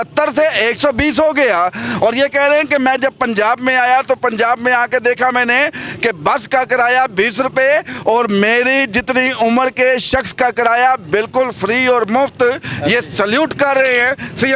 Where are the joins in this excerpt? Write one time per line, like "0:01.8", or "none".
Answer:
none